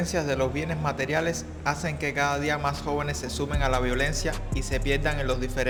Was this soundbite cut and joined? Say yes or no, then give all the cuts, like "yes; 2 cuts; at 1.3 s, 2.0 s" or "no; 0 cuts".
no; 0 cuts